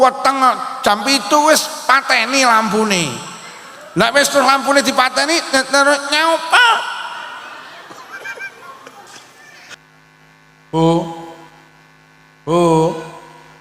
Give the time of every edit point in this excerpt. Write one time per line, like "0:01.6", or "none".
0:09.7